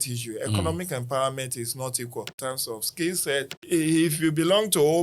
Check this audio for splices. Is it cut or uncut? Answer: cut